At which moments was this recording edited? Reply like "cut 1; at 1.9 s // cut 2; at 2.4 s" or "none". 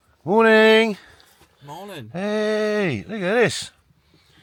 none